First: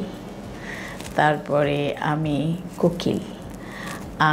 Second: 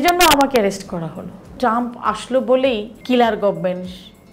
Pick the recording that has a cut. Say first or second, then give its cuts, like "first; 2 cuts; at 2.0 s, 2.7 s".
second; 2 cuts; at 1.6 s, 2.9 s